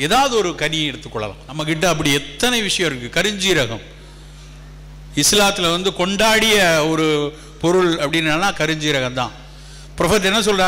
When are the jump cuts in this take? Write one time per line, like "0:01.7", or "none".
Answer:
0:01.5